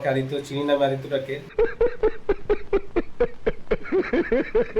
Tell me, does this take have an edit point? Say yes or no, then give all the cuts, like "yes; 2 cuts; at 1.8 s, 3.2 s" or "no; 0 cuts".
no; 0 cuts